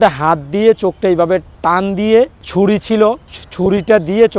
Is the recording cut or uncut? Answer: uncut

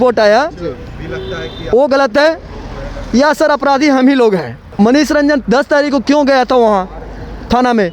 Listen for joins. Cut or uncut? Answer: cut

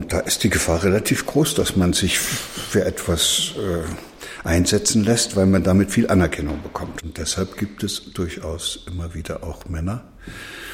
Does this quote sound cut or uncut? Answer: cut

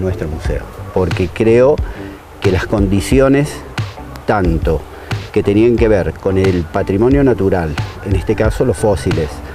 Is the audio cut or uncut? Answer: uncut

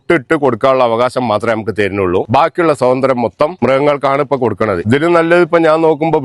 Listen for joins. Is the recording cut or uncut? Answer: cut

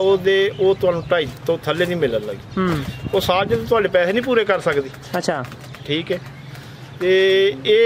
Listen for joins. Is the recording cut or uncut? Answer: uncut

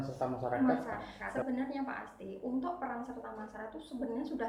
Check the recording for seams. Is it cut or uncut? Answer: cut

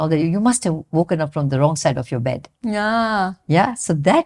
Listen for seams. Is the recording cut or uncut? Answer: uncut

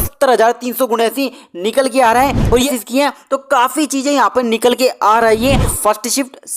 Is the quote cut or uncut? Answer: cut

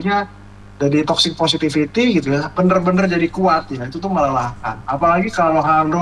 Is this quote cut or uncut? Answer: cut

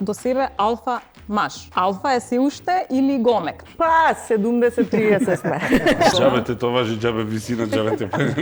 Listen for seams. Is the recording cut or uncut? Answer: cut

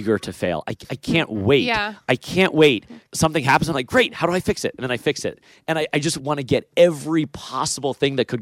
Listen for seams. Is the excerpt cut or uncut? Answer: cut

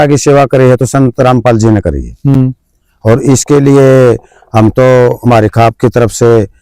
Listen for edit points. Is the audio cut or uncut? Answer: uncut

